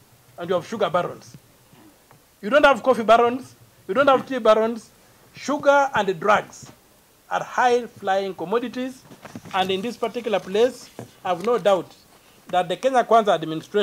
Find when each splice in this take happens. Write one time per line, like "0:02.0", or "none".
none